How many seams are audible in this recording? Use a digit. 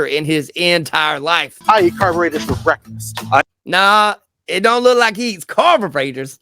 1